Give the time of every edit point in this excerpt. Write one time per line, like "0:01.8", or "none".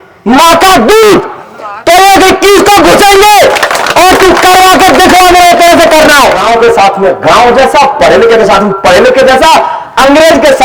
0:06.4